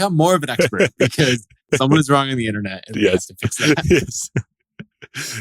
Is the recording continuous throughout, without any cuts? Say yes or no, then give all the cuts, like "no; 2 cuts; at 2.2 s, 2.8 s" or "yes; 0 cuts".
yes; 0 cuts